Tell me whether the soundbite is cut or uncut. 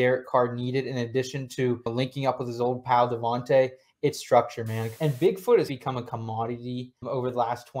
cut